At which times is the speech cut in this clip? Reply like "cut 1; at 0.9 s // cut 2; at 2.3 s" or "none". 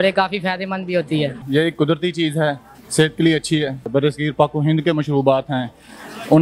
cut 1; at 1.4 s // cut 2; at 3.9 s